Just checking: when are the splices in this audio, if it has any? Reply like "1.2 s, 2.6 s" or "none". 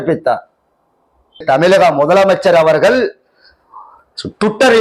1.4 s